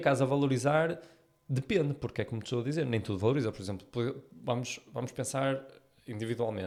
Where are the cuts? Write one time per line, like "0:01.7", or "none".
none